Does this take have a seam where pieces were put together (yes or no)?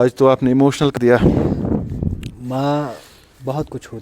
yes